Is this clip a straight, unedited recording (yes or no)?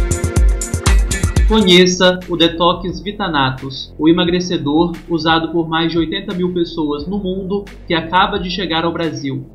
no